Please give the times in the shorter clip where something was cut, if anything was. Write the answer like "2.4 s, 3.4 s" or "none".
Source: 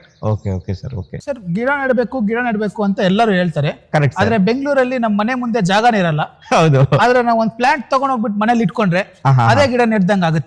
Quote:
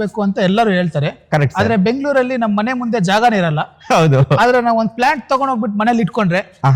none